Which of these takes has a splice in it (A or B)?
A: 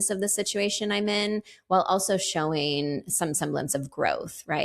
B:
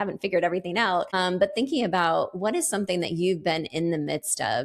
B